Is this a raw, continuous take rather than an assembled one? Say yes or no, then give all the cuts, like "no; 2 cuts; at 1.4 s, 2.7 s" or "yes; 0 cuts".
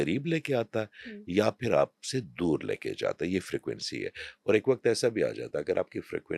yes; 0 cuts